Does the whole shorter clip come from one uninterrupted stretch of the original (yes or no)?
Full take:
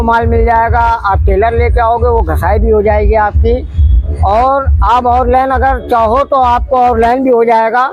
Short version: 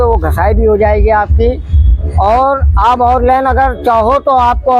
yes